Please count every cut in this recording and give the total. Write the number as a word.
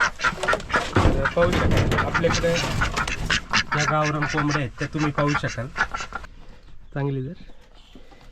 one